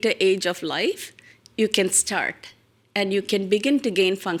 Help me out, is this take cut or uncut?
uncut